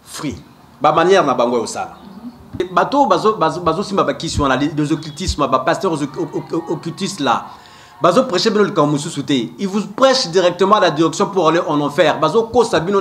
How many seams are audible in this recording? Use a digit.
1